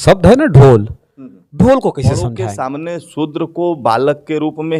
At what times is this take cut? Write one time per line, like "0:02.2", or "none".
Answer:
0:02.2